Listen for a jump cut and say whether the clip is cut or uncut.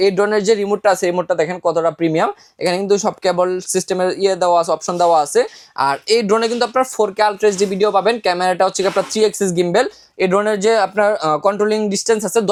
uncut